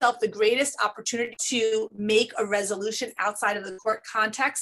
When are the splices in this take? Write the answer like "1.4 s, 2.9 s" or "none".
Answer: 1.4 s